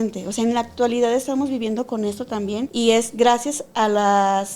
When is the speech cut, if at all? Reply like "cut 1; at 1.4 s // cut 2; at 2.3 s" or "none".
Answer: cut 1; at 2.7 s